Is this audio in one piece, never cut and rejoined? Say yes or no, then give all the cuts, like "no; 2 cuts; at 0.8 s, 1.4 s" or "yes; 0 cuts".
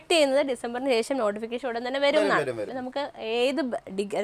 no; 1 cut; at 2.8 s